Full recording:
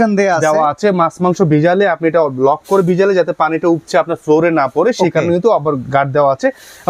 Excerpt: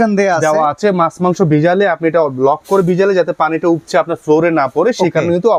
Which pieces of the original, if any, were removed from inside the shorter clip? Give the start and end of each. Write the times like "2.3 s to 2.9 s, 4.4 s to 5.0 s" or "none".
none